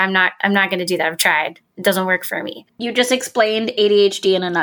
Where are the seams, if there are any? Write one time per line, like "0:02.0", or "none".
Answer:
0:02.6